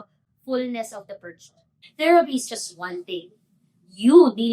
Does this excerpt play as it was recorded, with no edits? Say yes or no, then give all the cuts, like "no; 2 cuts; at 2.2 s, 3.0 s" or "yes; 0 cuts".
no; 1 cut; at 1.8 s